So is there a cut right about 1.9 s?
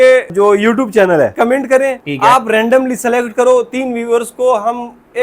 yes; 1 cut; at 1.9 s

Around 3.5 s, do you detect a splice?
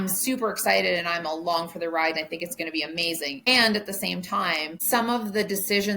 yes; 2 cuts; at 3.5 s, 4.7 s

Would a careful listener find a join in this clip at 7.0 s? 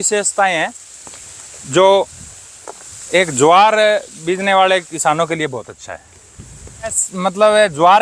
yes; 1 cut; at 7.0 s

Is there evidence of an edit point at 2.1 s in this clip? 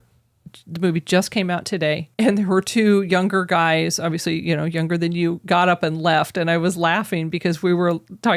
yes; 1 cut; at 2.1 s

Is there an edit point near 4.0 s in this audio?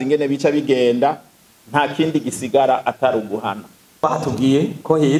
yes; 1 cut; at 4.0 s

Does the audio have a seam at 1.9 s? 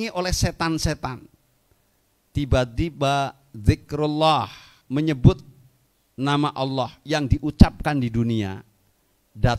no; 1 cut; at 4.7 s

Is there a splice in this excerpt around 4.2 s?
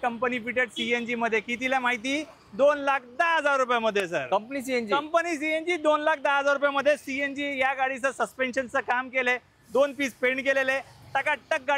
no; 0 cuts

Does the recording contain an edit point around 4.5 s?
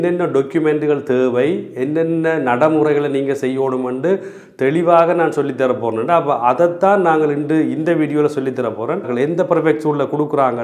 no; 1 cut; at 9.1 s

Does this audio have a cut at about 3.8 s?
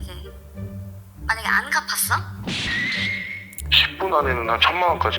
yes; 1 cut; at 3.8 s

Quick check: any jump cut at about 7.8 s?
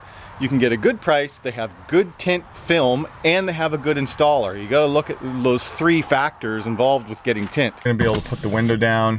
yes; 1 cut; at 7.8 s

